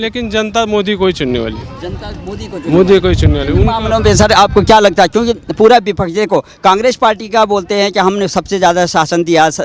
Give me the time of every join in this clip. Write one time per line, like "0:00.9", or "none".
none